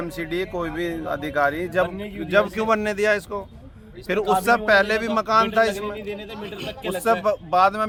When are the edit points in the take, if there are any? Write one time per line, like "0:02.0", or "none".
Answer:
none